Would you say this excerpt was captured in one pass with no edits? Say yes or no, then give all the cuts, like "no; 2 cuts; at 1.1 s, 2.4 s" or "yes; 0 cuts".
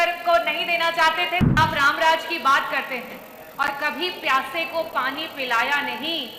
no; 1 cut; at 1.6 s